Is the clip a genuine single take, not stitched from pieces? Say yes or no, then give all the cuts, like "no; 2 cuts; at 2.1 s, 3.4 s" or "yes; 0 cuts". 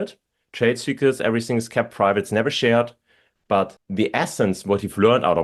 no; 1 cut; at 3.8 s